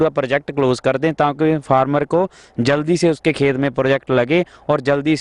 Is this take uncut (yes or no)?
yes